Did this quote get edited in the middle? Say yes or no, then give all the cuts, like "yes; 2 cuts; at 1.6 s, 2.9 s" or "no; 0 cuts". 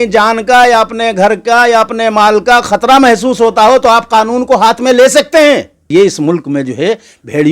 yes; 1 cut; at 5.9 s